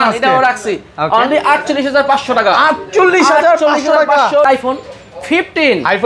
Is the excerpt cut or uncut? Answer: cut